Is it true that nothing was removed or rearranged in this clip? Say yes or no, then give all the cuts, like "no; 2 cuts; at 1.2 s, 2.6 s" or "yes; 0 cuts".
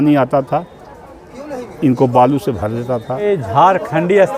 no; 1 cut; at 3.1 s